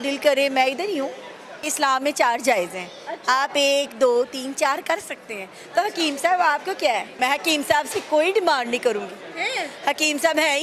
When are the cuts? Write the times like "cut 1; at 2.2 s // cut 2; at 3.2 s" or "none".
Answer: cut 1; at 1.7 s // cut 2; at 7.1 s